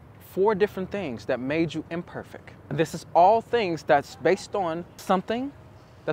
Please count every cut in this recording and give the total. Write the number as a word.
two